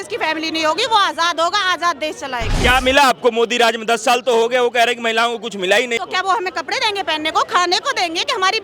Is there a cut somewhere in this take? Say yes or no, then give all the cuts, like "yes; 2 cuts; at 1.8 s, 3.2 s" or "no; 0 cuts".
yes; 2 cuts; at 2.6 s, 6.0 s